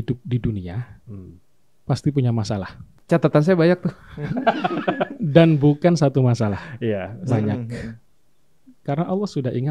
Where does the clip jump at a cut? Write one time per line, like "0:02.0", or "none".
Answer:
0:02.9